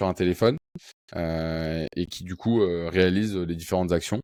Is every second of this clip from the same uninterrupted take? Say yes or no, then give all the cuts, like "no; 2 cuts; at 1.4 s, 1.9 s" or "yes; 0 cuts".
yes; 0 cuts